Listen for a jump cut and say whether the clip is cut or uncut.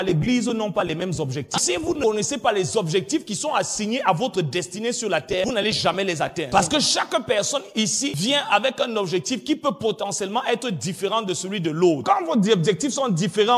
cut